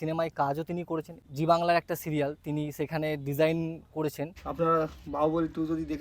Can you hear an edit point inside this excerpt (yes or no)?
yes